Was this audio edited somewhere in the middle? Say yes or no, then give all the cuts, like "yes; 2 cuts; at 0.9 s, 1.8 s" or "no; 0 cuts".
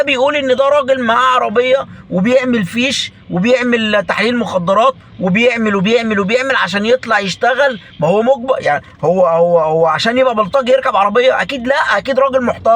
no; 0 cuts